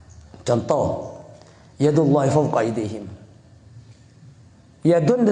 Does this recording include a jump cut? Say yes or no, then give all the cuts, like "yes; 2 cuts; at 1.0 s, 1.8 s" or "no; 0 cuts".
no; 0 cuts